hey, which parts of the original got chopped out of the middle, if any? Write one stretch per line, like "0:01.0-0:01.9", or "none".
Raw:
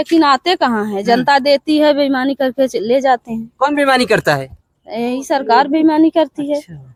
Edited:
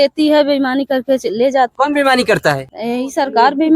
0:03.2-0:03.5
0:04.5-0:04.9